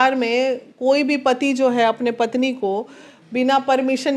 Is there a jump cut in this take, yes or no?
no